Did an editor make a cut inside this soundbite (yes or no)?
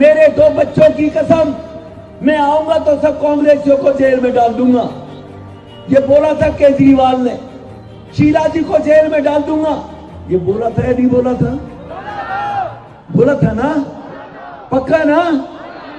no